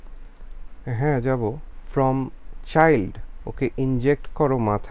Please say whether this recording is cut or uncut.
cut